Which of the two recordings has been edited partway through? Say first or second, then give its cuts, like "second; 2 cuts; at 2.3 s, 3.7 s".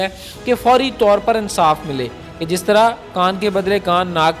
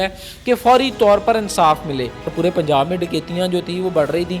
second; 1 cut; at 2.3 s